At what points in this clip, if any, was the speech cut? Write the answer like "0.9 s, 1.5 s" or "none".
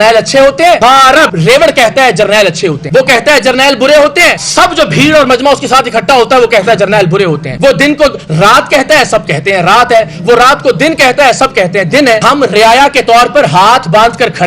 1.0 s, 12.2 s